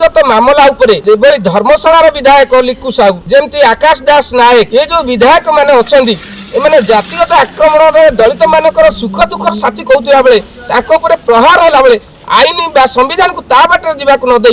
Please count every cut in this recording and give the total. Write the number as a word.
two